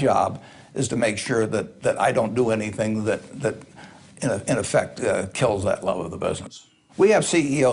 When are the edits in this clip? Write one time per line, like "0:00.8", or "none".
0:01.1